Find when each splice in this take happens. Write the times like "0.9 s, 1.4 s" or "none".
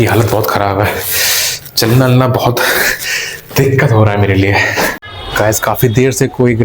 5.1 s